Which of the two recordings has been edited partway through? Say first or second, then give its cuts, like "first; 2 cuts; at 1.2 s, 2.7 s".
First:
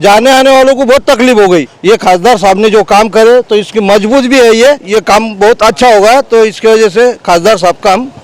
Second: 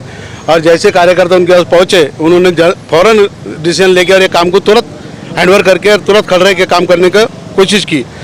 first; 2 cuts; at 1.7 s, 4.8 s